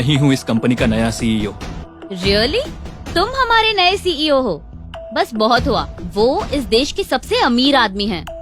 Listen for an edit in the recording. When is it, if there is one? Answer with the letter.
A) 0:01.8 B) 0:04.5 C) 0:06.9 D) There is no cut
A